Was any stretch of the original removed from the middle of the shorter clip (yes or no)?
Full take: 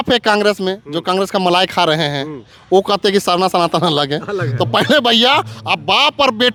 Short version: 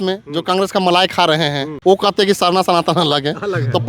yes